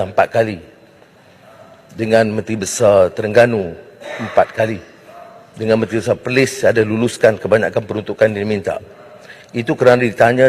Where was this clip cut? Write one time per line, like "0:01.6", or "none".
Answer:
none